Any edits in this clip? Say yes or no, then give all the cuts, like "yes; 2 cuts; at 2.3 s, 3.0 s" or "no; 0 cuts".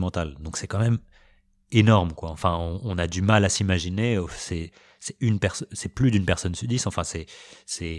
no; 0 cuts